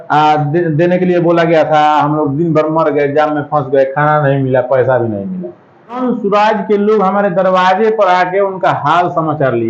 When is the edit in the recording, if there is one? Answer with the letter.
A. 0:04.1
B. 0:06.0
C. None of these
B